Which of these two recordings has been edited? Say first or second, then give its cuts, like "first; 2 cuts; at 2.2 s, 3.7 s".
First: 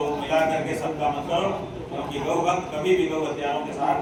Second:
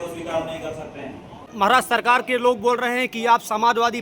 second; 1 cut; at 1.5 s